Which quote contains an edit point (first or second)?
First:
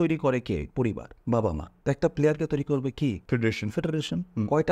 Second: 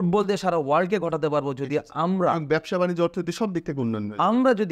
first